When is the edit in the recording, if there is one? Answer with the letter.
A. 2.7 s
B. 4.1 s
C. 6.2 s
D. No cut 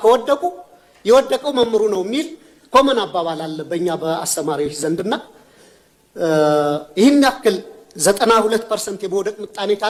D